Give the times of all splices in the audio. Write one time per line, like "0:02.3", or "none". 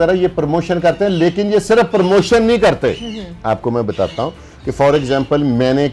none